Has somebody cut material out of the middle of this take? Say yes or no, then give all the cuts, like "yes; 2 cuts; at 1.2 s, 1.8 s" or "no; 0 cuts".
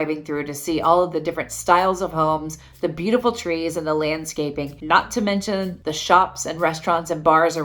no; 0 cuts